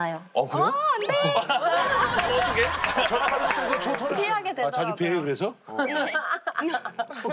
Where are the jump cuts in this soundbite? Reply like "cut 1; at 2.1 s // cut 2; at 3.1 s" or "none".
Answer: cut 1; at 3.9 s